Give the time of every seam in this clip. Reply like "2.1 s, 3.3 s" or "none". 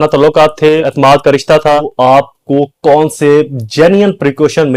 0.9 s, 1.9 s

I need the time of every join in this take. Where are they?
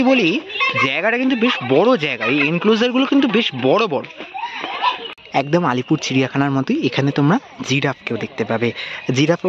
5.5 s

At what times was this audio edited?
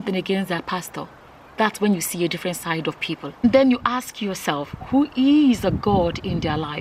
3.4 s

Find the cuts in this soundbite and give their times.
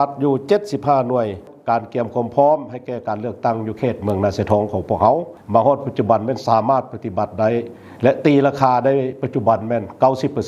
1.5 s, 5.3 s

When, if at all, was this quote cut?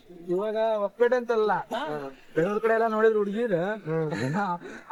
none

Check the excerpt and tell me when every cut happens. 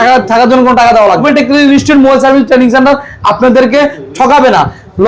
1.2 s

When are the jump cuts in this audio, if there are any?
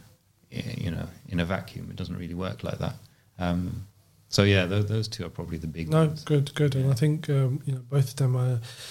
none

